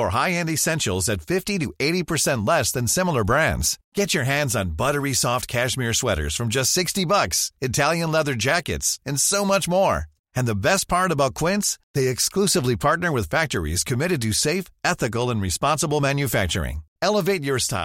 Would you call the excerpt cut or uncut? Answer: uncut